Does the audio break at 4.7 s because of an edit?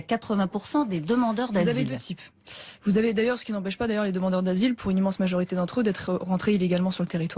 no; 1 cut; at 2.4 s

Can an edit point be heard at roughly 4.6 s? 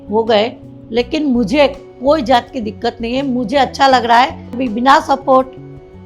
yes; 1 cut; at 4.6 s

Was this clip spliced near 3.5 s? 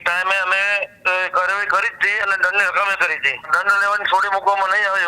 yes; 1 cut; at 3.5 s

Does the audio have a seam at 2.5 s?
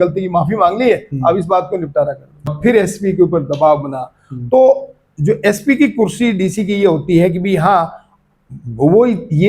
yes; 1 cut; at 2.5 s

